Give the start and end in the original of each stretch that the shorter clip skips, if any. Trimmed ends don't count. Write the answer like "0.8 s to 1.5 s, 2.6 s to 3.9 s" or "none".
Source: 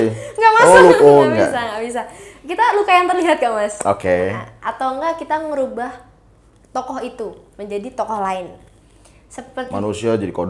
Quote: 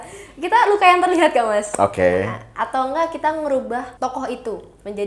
6.0 s to 6.6 s

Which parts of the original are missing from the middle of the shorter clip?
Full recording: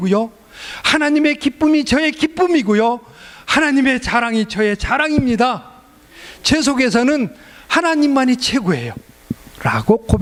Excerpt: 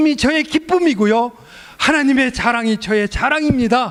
none

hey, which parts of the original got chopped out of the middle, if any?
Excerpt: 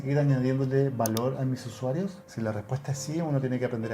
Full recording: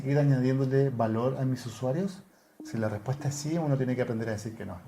2.2 s to 2.6 s

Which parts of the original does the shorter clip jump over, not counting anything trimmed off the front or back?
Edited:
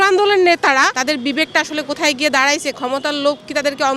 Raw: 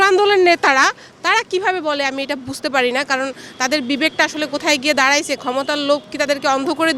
1.0 s to 3.6 s

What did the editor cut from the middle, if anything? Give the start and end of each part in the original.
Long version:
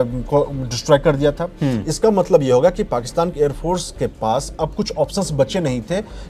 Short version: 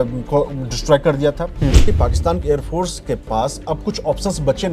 1.9 s to 2.8 s

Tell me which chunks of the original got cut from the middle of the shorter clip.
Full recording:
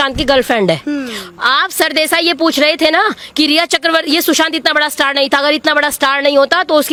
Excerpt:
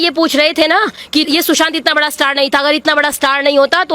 3.5 s to 4.0 s

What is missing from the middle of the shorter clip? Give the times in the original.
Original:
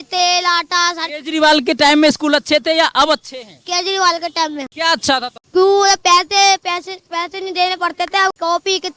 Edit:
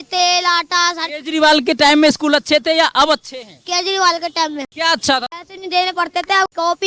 5.4 s to 7.2 s

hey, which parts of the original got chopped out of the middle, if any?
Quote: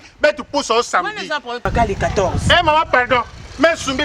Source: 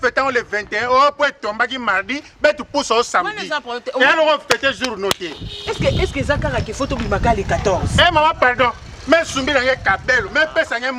3.8 s to 7.1 s

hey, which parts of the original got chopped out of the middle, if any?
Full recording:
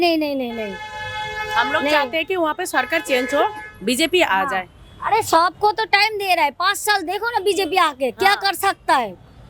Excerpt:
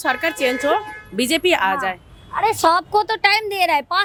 none

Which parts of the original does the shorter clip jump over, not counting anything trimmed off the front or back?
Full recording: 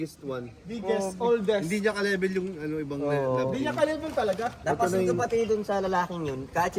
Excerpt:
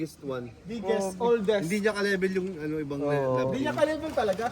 none

